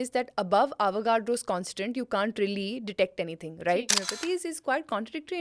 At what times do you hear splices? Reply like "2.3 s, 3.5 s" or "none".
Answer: 4.0 s